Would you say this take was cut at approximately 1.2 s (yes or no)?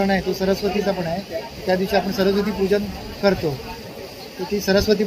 no